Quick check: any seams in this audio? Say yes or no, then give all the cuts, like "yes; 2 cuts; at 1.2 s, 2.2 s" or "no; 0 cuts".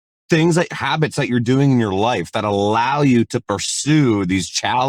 no; 0 cuts